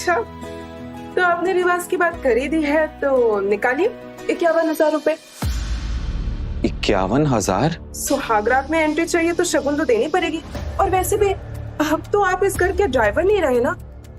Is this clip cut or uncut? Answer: uncut